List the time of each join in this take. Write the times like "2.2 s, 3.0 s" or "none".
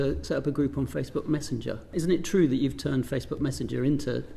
1.9 s